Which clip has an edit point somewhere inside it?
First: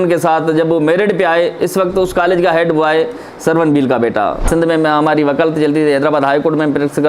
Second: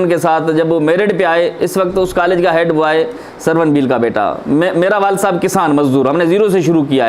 first; 1 cut; at 4.4 s

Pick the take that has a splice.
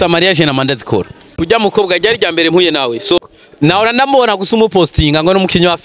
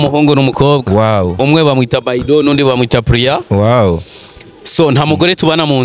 first; 2 cuts; at 1.4 s, 3.2 s

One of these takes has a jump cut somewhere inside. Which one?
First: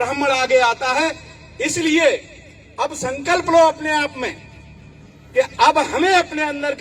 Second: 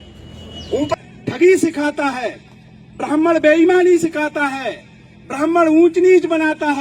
second; 1 cut; at 0.9 s

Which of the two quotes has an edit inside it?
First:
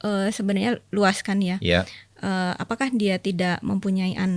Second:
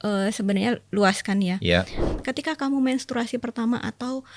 second; 1 cut; at 2.1 s

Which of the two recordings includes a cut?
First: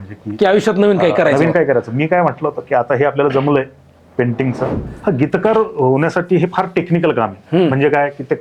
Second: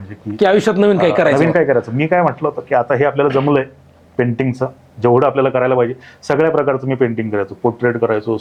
first; 1 cut; at 4.8 s

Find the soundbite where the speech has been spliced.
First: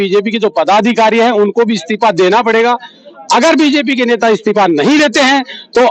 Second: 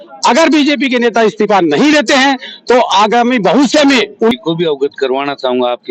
second; 1 cut; at 4.4 s

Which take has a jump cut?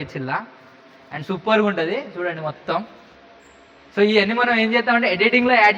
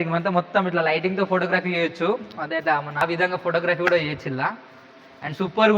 second; 1 cut; at 3.0 s

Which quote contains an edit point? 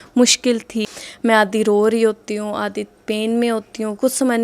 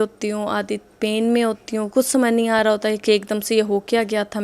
first; 1 cut; at 0.9 s

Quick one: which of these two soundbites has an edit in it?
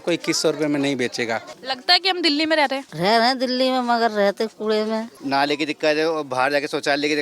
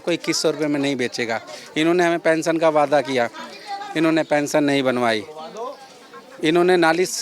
first; 3 cuts; at 1.5 s, 2.9 s, 5.1 s

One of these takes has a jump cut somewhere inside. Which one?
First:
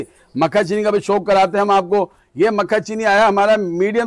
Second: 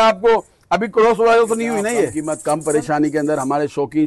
second; 1 cut; at 2.2 s

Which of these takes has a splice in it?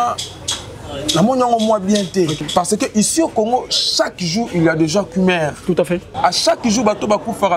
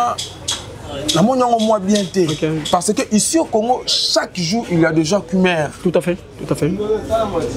first; 2 cuts; at 2.4 s, 6.2 s

